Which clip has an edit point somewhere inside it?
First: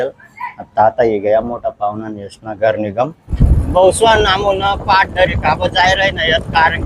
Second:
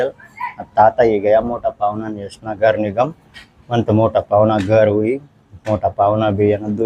first; 1 cut; at 3.2 s

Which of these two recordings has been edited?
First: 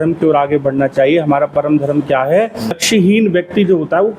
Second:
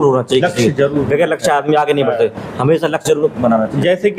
first; 1 cut; at 2.8 s

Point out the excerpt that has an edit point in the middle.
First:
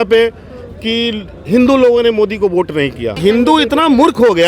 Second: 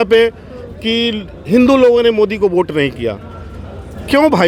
first; 1 cut; at 3.2 s

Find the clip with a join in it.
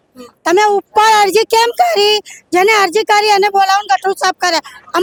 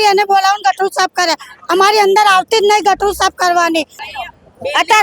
second; 1 cut; at 4.0 s

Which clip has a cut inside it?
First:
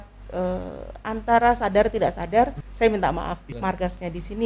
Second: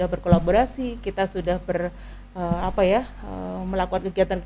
first; 2 cuts; at 2.6 s, 3.5 s

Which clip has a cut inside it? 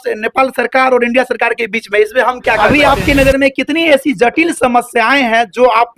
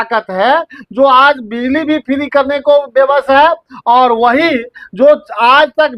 first; 1 cut; at 2.6 s

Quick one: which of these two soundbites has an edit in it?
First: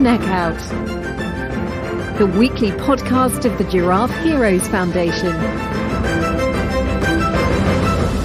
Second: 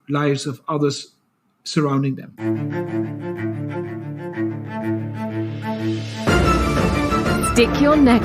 second; 1 cut; at 2.3 s

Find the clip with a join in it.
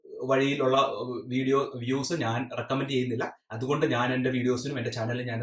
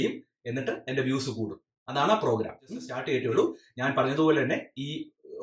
second; 1 cut; at 2.9 s

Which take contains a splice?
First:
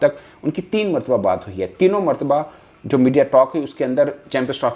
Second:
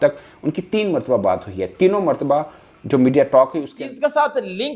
second; 1 cut; at 3.7 s

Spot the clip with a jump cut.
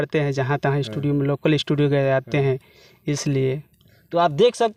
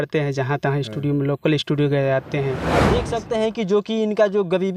second; 1 cut; at 3.0 s

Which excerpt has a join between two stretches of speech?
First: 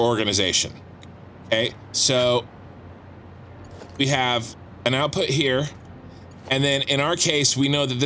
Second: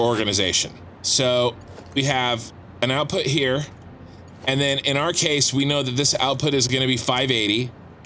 second; 2 cuts; at 1.0 s, 1.7 s

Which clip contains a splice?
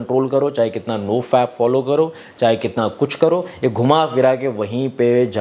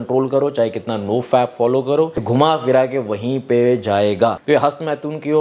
second; 2 cuts; at 2.3 s, 4.4 s

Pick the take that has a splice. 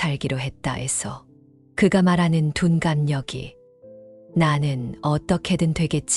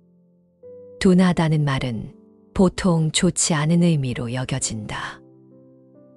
second; 2 cuts; at 1.0 s, 5.1 s

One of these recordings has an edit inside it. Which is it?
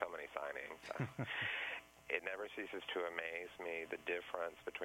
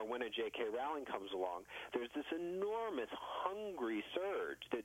first; 1 cut; at 1.8 s

